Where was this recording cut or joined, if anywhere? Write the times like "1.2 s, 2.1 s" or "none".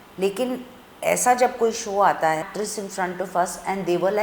2.5 s